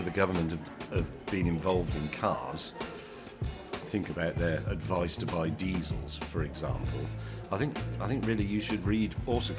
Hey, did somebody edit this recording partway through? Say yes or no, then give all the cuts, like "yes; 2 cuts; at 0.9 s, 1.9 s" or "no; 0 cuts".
no; 0 cuts